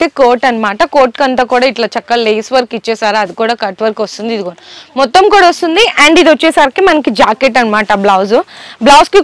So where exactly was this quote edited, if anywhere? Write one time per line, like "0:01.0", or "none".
none